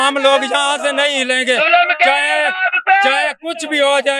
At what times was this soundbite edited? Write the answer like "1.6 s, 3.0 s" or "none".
none